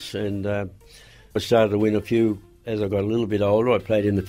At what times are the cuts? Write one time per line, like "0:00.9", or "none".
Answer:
0:02.6